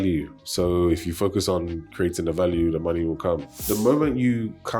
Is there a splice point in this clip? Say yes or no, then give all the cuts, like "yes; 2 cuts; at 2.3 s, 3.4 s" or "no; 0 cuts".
yes; 1 cut; at 3.5 s